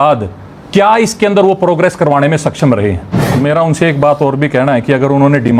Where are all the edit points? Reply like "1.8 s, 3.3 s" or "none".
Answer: 3.3 s